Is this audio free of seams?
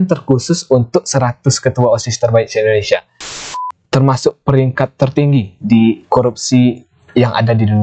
no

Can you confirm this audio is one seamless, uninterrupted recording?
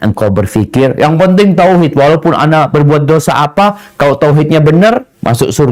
yes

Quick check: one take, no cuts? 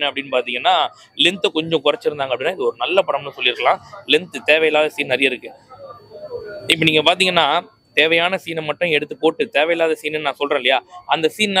yes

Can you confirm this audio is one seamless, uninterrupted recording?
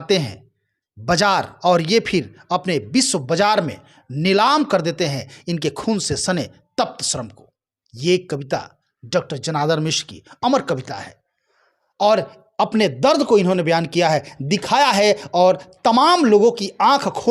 yes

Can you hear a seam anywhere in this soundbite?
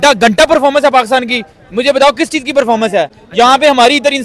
no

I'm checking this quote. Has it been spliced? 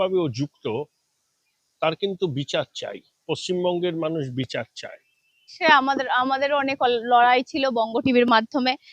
yes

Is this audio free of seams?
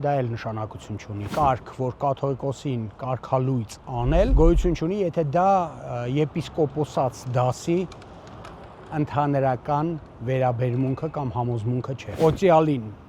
no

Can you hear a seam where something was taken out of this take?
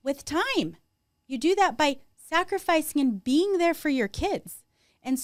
no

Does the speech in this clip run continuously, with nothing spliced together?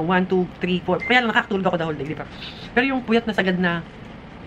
yes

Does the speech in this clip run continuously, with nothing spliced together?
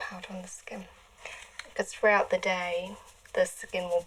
yes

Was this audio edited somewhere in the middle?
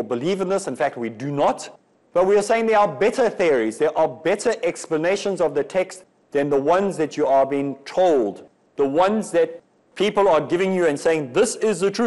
no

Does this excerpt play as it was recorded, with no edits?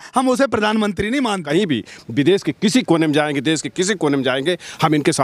no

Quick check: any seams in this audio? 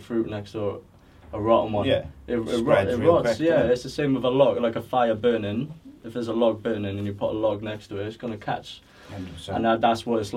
no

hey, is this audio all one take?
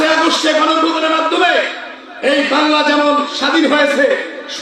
yes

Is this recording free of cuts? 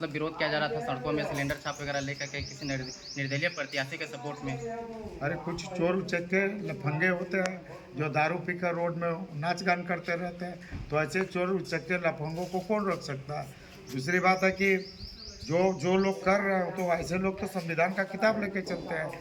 yes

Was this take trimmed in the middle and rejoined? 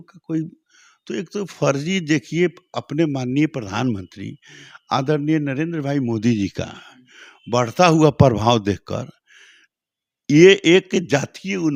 no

